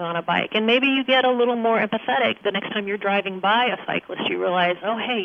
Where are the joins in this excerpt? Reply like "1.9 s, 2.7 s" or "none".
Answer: 2.4 s